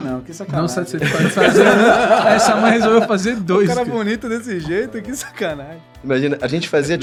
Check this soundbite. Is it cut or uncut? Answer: uncut